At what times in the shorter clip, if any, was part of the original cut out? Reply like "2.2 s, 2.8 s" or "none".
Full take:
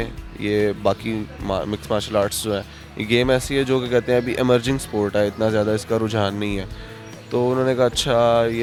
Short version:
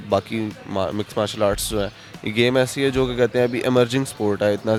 none